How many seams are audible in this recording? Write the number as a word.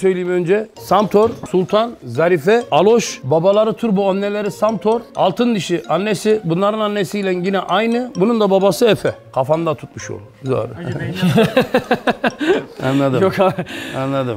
zero